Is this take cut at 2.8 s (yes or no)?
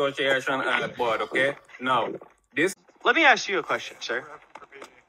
yes